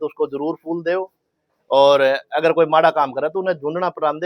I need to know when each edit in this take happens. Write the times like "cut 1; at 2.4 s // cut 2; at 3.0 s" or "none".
none